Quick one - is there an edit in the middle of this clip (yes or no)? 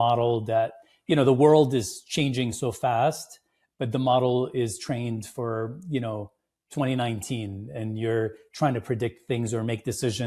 no